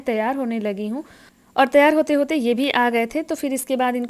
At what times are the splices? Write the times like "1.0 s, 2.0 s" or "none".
none